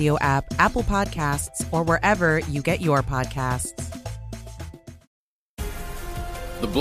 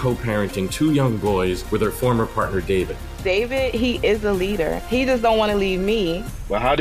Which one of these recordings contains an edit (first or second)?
first